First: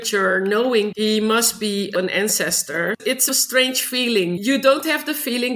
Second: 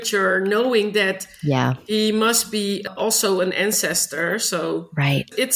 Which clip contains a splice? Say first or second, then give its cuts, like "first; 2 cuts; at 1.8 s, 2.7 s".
first; 4 cuts; at 0.9 s, 1.9 s, 3.2 s, 4.4 s